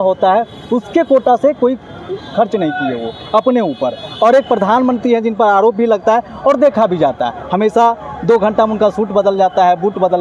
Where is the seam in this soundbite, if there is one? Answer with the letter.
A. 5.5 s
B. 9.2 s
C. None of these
C